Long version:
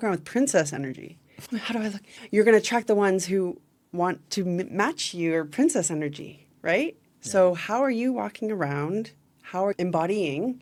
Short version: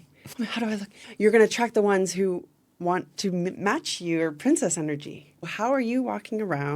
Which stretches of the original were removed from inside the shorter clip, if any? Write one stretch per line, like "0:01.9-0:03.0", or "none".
0:06.6-0:07.6

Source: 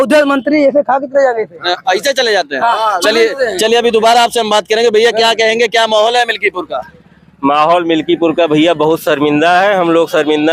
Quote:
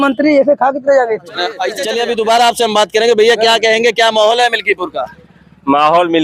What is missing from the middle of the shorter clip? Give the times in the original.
0:02.0-0:03.5

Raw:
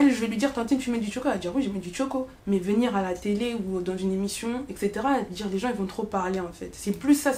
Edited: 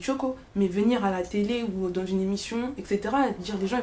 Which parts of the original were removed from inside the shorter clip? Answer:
none

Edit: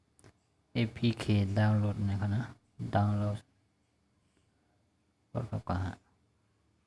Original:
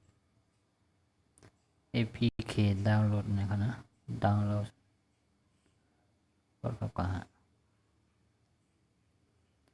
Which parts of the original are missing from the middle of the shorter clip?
0:02.3-0:02.4

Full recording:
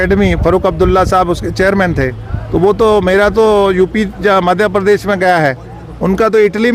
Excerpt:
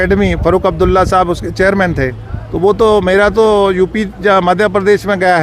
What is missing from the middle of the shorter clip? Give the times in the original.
none

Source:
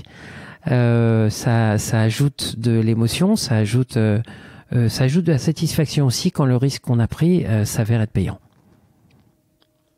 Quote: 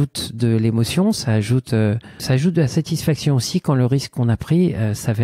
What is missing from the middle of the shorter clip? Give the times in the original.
0:04.5-0:04.9

